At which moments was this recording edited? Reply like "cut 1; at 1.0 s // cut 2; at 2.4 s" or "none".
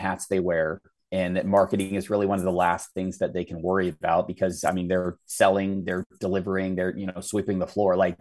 none